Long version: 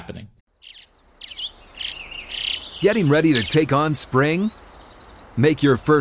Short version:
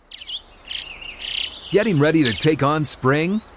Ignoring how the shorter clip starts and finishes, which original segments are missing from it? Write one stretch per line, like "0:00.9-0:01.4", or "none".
none